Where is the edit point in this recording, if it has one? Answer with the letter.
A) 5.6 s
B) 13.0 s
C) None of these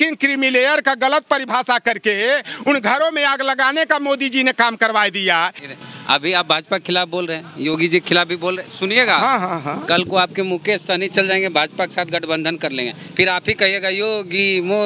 A